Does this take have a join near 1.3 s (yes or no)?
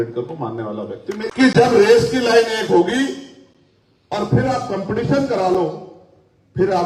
yes